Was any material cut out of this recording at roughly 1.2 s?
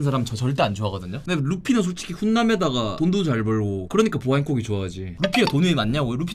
yes; 2 cuts; at 1.2 s, 5.0 s

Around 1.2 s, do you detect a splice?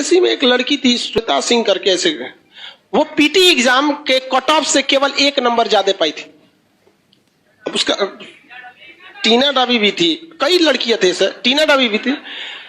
yes; 1 cut; at 1.2 s

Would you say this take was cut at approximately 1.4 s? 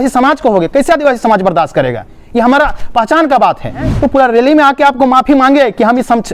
no; 1 cut; at 3.9 s

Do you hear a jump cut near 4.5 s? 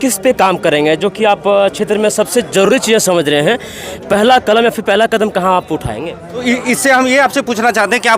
no; 1 cut; at 6.4 s

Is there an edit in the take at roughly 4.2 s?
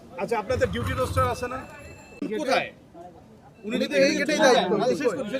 no; 1 cut; at 2.3 s

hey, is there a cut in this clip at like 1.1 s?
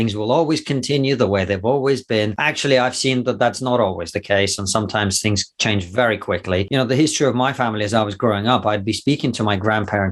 no; 2 cuts; at 2.4 s, 6.7 s

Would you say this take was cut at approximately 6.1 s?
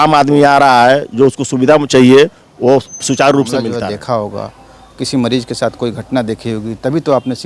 no; 1 cut; at 3.7 s

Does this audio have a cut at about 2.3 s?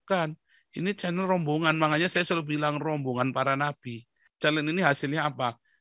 no; 1 cut; at 4.2 s

